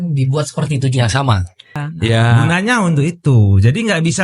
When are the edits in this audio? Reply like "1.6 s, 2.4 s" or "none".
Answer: 2.4 s